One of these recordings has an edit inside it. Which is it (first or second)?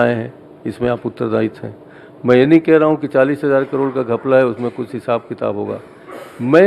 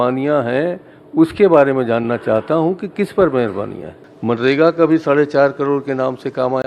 second